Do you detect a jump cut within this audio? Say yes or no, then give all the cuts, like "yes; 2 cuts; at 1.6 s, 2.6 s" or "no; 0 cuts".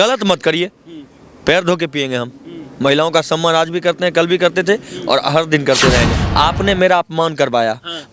yes; 1 cut; at 6.2 s